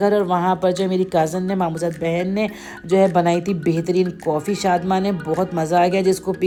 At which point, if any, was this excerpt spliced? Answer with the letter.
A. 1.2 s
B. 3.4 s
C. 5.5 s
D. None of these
D